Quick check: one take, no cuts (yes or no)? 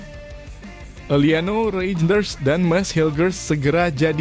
no